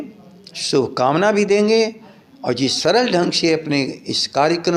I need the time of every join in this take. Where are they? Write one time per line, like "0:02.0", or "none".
none